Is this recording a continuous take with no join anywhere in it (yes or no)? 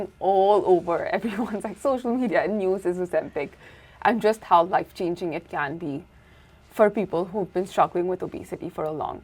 yes